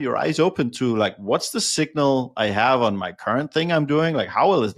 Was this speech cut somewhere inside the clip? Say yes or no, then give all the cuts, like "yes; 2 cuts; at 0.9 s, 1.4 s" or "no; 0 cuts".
no; 0 cuts